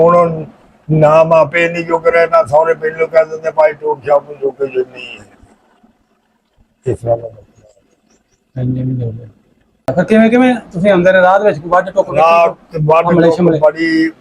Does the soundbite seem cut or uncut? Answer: cut